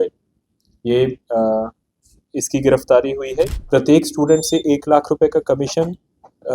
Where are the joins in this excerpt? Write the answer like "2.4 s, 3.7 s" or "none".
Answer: 3.5 s